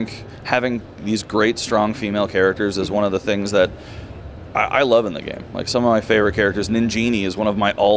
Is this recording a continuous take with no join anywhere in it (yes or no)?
yes